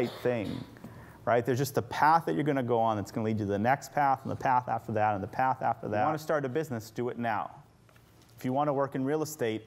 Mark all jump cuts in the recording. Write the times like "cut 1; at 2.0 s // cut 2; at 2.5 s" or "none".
cut 1; at 6.0 s